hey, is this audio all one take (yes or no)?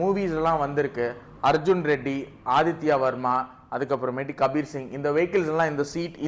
yes